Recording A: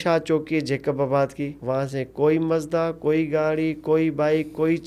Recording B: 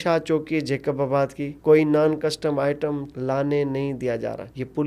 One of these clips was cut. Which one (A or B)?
B